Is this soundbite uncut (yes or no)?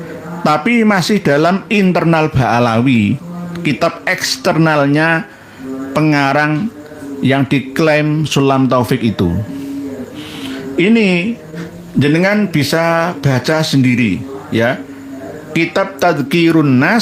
yes